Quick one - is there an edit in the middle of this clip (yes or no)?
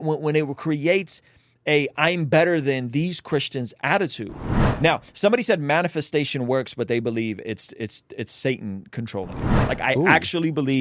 yes